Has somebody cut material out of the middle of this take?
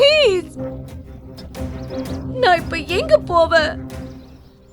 no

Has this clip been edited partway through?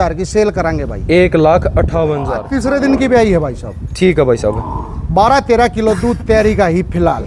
yes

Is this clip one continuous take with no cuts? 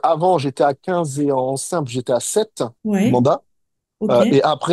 no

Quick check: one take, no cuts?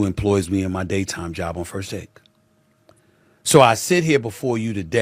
yes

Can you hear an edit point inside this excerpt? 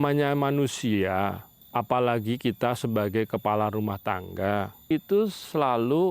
yes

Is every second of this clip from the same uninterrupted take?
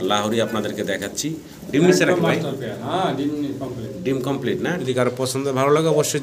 no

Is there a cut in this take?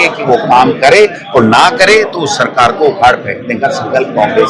no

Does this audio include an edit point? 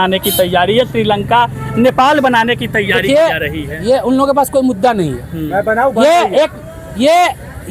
no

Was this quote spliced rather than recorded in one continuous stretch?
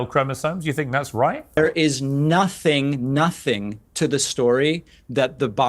yes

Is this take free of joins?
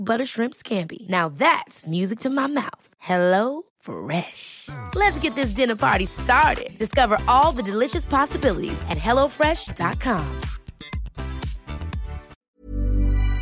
no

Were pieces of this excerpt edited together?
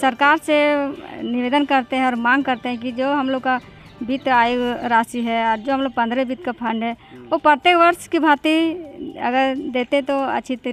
no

